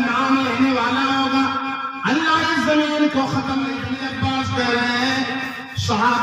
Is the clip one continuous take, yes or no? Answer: no